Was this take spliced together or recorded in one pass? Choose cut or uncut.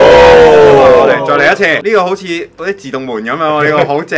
cut